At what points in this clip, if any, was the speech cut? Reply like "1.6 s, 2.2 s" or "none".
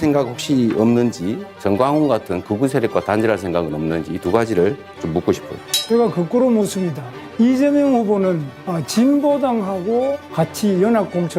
none